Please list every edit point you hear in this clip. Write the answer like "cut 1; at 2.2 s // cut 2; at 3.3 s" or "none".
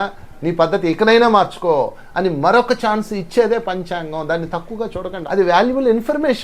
cut 1; at 5.2 s

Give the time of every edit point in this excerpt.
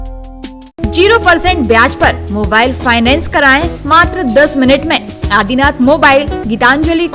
none

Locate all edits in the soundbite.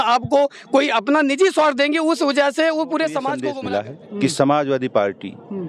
cut 1; at 3.5 s

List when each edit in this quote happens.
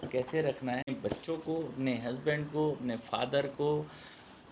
cut 1; at 1.0 s

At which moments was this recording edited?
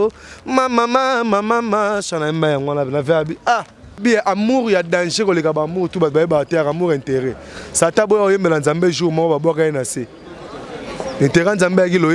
cut 1; at 4.0 s

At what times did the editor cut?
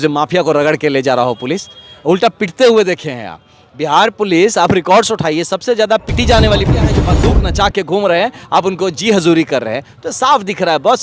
cut 1; at 7.1 s

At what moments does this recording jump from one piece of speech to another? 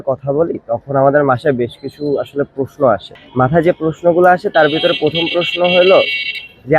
none

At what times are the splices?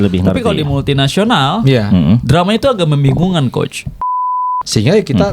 cut 1; at 4.2 s

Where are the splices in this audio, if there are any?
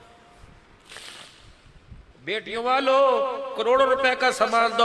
cut 1; at 2.1 s

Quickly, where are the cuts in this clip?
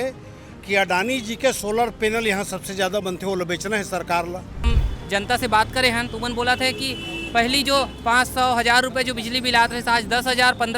cut 1; at 4.7 s

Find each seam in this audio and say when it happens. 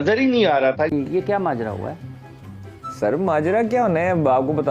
cut 1; at 0.9 s

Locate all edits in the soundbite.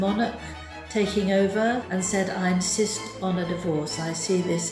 cut 1; at 1.8 s

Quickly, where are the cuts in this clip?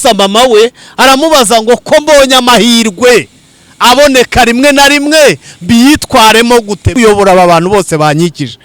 cut 1; at 6.9 s

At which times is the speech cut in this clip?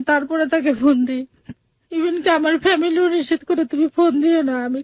none

